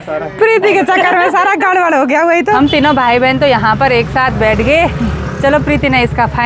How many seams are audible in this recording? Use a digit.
1